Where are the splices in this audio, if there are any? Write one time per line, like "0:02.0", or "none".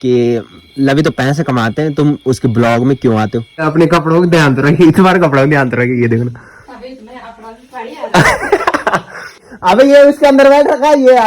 0:03.7
0:09.5